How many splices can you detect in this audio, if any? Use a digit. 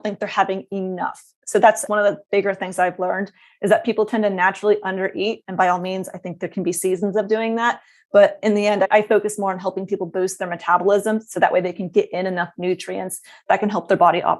0